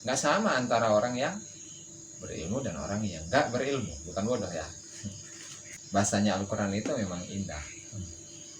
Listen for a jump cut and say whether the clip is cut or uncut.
cut